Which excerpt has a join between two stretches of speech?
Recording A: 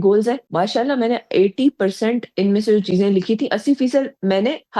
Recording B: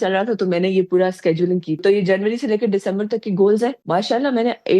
B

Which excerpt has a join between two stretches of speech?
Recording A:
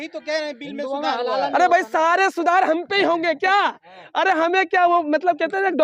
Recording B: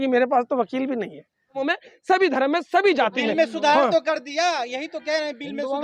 B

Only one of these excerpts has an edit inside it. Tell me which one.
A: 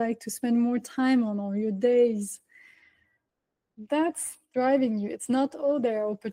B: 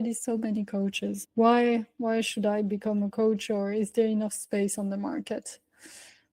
B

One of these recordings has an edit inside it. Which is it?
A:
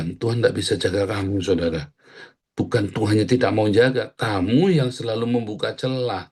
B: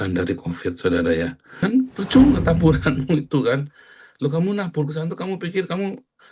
B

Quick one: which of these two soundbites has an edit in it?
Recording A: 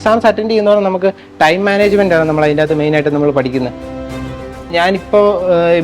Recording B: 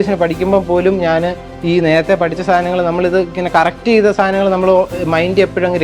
A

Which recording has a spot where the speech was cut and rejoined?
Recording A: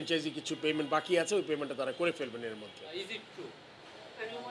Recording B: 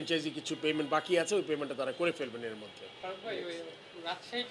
A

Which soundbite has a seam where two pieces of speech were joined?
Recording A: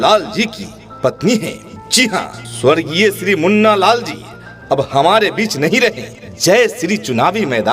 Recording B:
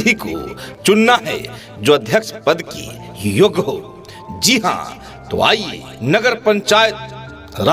A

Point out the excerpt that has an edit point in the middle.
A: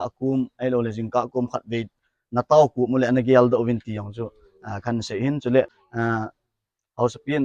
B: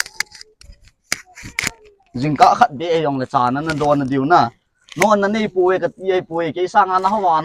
A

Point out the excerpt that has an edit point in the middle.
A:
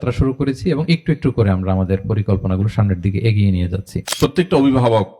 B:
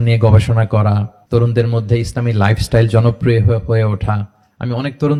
A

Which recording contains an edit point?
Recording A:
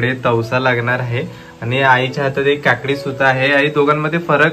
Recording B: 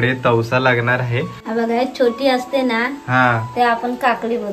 B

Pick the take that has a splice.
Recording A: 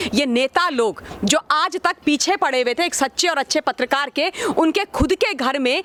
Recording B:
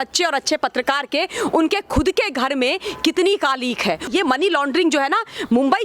B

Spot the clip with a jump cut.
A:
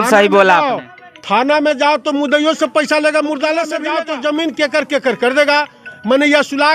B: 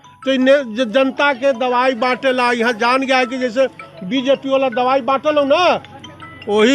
A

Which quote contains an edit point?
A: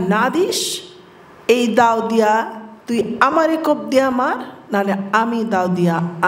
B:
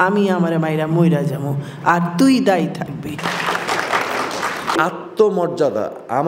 B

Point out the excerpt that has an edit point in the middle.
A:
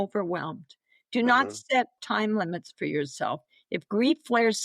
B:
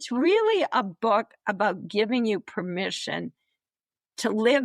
A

